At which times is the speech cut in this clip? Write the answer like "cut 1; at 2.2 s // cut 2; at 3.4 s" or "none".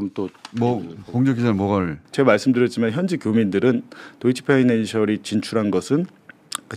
cut 1; at 2.0 s